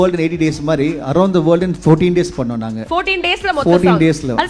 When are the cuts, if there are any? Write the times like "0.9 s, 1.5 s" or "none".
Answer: none